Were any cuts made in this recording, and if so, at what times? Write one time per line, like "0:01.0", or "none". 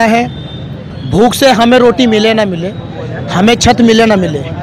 none